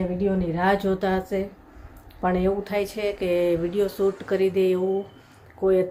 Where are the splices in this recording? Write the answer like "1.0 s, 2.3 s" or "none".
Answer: none